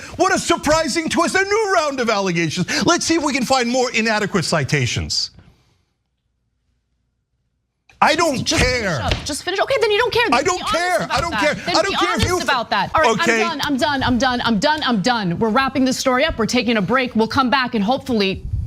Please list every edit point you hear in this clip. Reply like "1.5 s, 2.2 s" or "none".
12.9 s